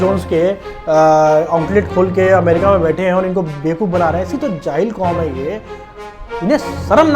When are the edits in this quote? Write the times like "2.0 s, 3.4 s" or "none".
5.9 s